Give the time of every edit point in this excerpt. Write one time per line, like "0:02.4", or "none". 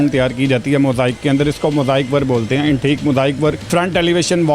0:03.6